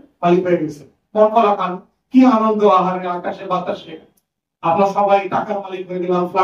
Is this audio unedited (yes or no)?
yes